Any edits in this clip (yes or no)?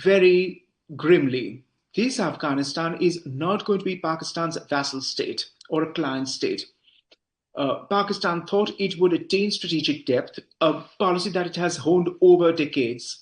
yes